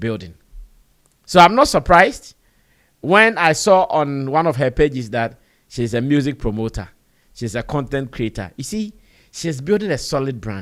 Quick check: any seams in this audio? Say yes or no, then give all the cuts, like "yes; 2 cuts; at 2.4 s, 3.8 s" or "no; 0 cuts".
no; 0 cuts